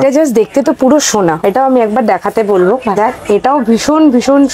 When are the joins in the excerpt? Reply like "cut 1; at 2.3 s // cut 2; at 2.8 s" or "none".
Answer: cut 1; at 1.4 s